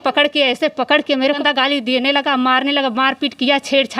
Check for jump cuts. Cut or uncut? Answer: cut